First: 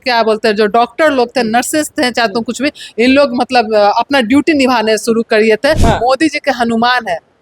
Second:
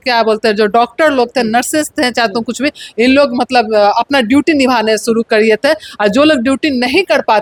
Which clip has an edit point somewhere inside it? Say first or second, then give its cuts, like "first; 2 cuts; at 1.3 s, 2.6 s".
first; 1 cut; at 5.8 s